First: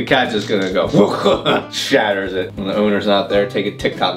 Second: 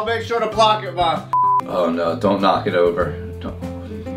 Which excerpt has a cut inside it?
second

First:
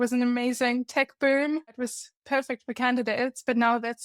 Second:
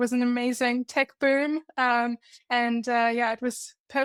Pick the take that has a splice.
first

